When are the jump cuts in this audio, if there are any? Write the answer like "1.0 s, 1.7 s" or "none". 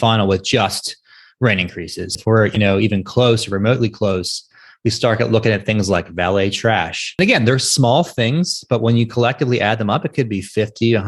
2.1 s, 7.2 s